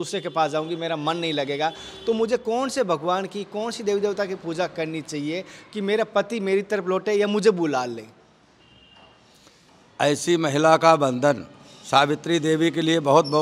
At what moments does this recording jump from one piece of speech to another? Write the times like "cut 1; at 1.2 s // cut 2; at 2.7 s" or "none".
none